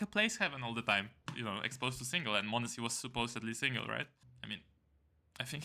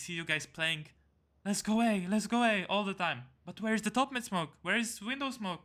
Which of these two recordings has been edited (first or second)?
first